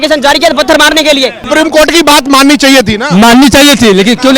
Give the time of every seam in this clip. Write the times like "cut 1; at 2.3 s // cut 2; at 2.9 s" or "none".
cut 1; at 1.5 s